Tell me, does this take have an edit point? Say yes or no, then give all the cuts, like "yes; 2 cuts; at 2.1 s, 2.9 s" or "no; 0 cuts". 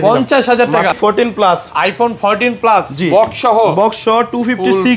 yes; 1 cut; at 0.9 s